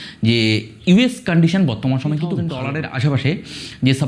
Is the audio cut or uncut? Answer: cut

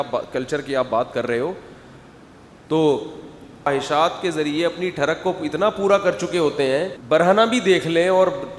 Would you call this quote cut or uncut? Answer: cut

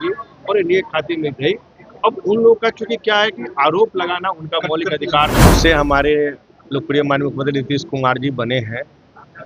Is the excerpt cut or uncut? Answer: cut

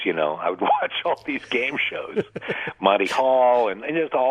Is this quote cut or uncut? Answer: uncut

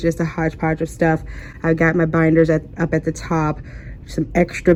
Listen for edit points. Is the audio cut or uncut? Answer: uncut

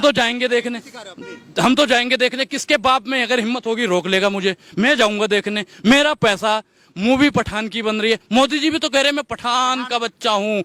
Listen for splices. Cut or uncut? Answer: uncut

